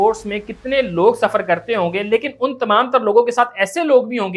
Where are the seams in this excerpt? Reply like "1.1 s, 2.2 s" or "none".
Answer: none